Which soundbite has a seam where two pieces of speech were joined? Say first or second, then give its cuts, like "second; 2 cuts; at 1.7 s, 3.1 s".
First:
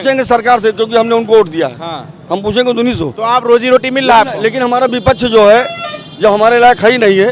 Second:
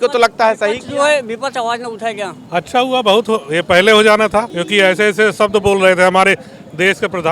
second; 2 cuts; at 2.3 s, 4.6 s